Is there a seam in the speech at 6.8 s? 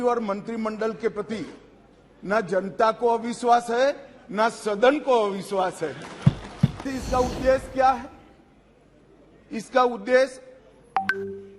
yes; 1 cut; at 6.8 s

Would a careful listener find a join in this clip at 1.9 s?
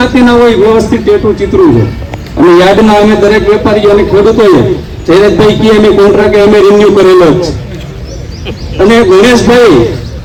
no; 0 cuts

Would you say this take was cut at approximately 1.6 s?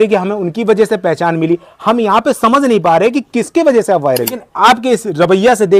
no; 1 cut; at 4.4 s

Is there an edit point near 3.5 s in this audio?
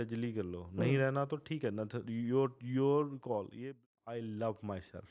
yes; 1 cut; at 3.5 s

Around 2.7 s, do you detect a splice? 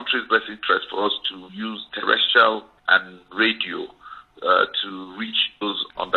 yes; 1 cut; at 2.7 s

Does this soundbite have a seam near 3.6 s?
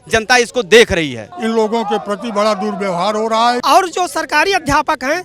yes; 2 cuts; at 1.2 s, 3.6 s

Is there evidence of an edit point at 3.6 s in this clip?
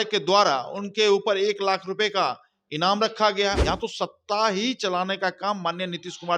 yes; 1 cut; at 3.6 s

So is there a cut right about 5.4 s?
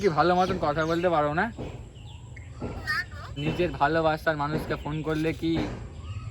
no; 1 cut; at 3.4 s

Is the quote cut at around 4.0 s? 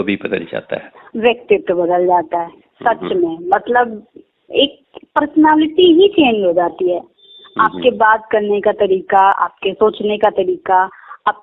no; 0 cuts

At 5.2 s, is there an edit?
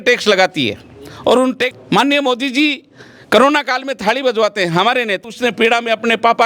yes; 2 cuts; at 1.8 s, 5.2 s

